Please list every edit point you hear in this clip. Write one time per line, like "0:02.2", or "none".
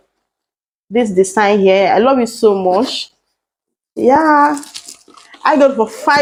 none